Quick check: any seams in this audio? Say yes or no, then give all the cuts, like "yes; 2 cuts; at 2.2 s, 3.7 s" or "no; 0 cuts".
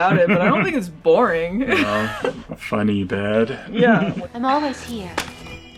no; 0 cuts